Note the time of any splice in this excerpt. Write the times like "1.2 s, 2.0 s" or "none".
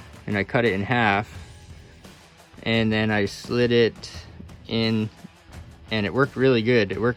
none